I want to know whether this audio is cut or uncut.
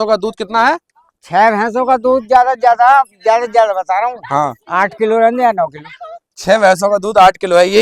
uncut